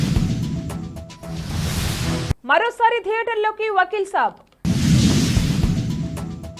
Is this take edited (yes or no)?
no